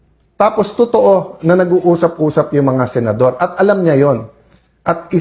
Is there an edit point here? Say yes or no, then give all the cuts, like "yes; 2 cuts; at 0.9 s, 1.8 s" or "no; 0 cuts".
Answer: no; 0 cuts